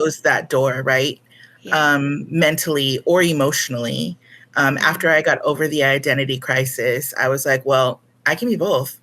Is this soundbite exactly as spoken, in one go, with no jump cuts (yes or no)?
yes